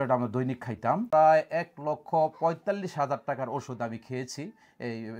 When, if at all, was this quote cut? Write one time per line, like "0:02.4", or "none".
0:01.0